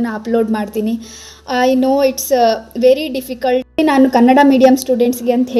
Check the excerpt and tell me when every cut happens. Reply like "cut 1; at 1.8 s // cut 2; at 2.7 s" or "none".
cut 1; at 3.8 s

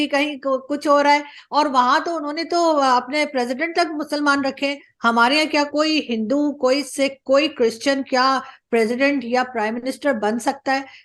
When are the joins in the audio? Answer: none

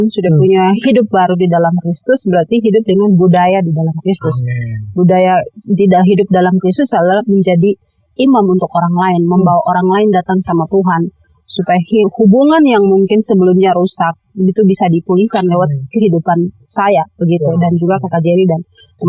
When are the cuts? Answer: none

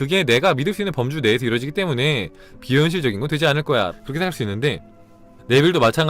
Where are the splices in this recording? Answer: cut 1; at 3.9 s

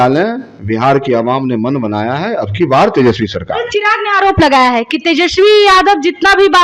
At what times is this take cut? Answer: none

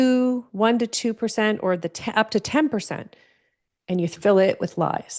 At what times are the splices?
none

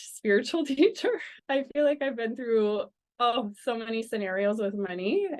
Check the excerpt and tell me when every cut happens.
cut 1; at 1.3 s

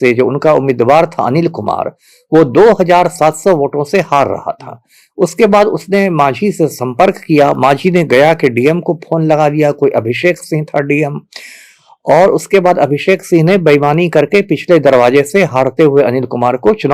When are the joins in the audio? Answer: none

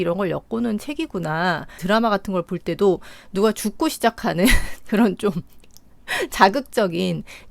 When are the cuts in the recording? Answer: cut 1; at 1.8 s

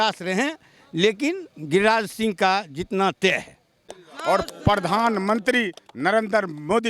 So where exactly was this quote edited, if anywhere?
cut 1; at 3.9 s

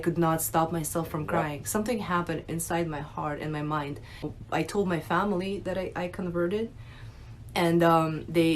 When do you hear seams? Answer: cut 1; at 4.4 s

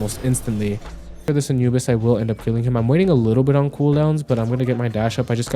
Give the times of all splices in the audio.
cut 1; at 1.2 s

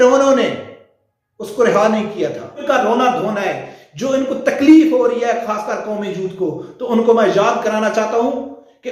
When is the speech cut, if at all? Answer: cut 1; at 2.6 s

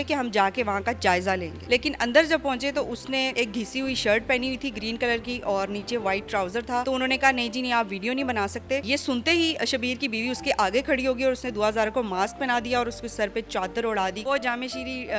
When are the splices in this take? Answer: cut 1; at 1.5 s // cut 2; at 3.3 s // cut 3; at 6.8 s // cut 4; at 8.8 s // cut 5; at 14.2 s

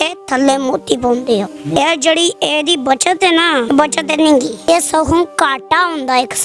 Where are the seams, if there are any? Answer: cut 1; at 1.8 s // cut 2; at 3.7 s // cut 3; at 4.7 s

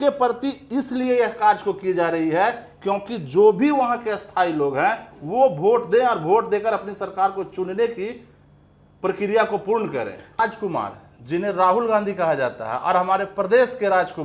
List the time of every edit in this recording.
cut 1; at 10.4 s

